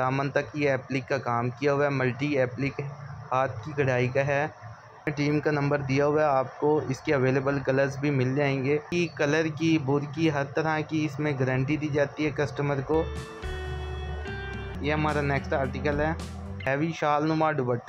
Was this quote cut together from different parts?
yes; 4 cuts; at 5.1 s, 8.9 s, 14.7 s, 16.6 s

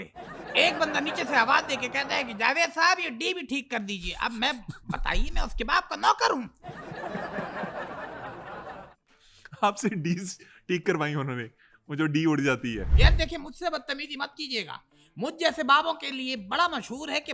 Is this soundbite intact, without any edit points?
no; 1 cut; at 12.9 s

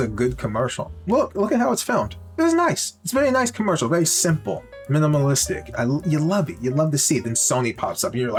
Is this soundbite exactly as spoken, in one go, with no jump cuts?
yes; 0 cuts

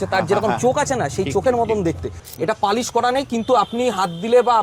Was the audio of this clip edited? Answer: yes; 1 cut; at 2.2 s

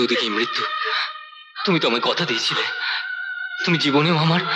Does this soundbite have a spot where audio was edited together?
no; 0 cuts

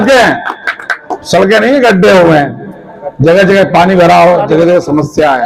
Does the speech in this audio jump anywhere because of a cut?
no; 0 cuts

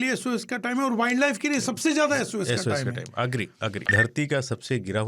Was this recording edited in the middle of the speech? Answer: yes; 1 cut; at 3.9 s

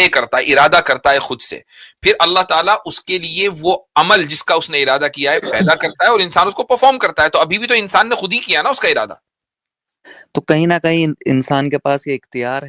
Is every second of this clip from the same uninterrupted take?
yes; 0 cuts

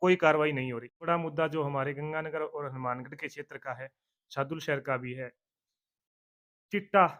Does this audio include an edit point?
yes; 1 cut; at 0.9 s

